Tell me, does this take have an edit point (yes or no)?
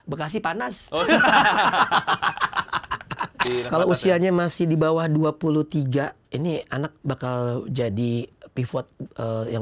yes